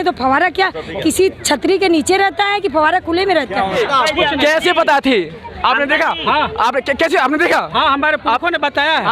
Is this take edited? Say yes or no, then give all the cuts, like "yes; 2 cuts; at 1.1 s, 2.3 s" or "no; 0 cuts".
yes; 1 cut; at 3.8 s